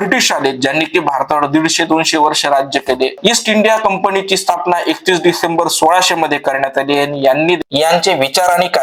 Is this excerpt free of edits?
no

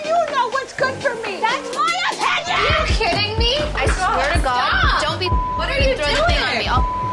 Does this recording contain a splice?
no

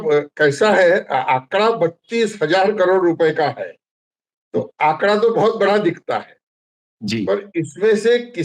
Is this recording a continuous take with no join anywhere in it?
yes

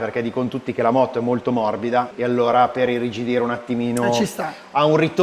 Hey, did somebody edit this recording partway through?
yes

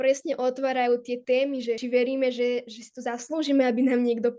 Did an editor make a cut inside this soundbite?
yes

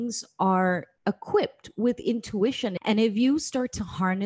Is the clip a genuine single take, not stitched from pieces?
no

